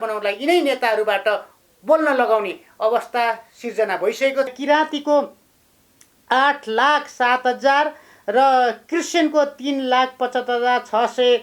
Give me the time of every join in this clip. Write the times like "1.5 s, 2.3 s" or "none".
4.5 s